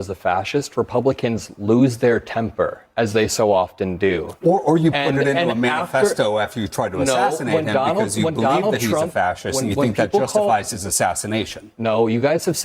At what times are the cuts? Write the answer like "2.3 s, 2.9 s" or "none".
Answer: none